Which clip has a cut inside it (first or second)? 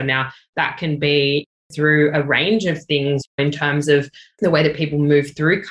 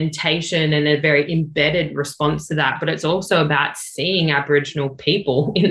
first